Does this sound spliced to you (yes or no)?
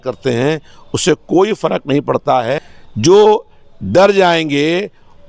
yes